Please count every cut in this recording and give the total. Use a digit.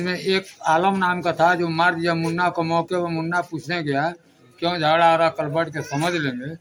0